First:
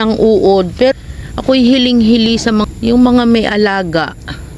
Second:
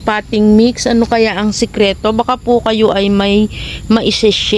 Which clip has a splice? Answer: first; 2 cuts; at 0.9 s, 2.6 s

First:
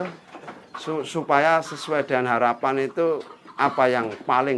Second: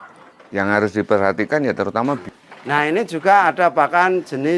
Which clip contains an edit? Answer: second; 1 cut; at 2.3 s

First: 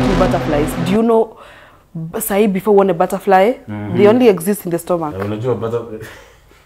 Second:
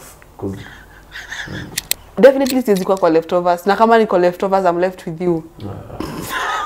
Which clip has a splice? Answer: second; 1 cut; at 2.1 s

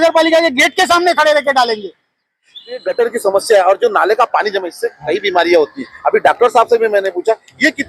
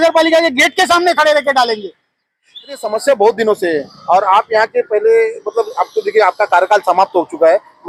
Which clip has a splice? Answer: first; 1 cut; at 2.9 s

